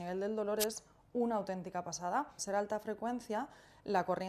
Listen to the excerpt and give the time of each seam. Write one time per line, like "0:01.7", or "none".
0:02.4